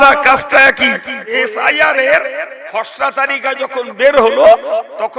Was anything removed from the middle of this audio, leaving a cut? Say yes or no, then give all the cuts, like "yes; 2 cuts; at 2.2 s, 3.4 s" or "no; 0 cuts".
yes; 1 cut; at 1.3 s